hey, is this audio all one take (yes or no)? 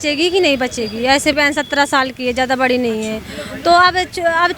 no